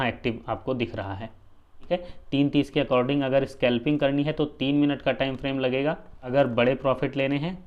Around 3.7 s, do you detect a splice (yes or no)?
no